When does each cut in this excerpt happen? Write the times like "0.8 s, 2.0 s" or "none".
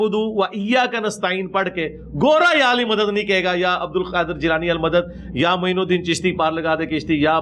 none